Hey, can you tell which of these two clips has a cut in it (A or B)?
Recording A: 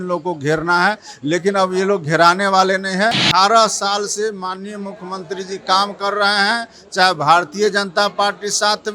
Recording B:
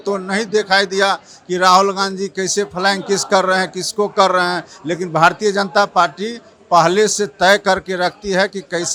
A